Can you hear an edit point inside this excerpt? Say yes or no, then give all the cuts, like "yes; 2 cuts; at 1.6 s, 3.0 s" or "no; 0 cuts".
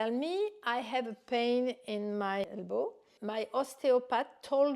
yes; 1 cut; at 3.1 s